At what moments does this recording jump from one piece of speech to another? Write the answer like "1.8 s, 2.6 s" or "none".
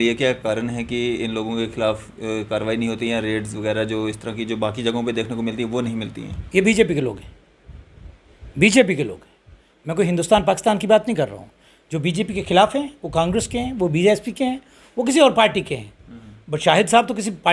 none